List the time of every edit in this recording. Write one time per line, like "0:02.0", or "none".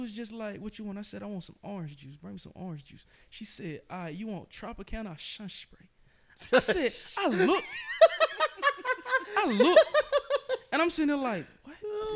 none